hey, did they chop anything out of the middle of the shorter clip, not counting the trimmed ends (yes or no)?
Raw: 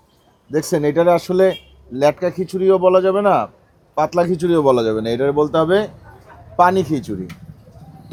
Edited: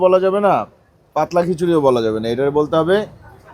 no